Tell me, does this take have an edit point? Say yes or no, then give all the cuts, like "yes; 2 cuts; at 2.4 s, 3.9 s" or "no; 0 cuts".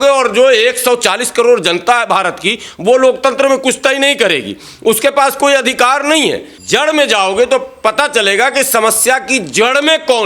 yes; 1 cut; at 6.5 s